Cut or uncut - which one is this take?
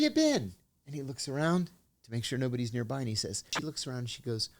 cut